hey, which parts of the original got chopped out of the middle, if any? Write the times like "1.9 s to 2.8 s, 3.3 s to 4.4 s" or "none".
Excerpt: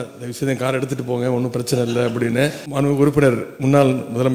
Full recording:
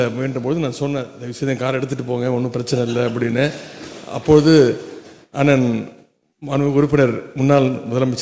3.6 s to 6.4 s